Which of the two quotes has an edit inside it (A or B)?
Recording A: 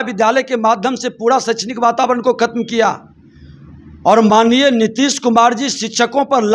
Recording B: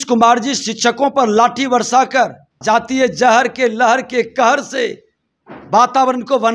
B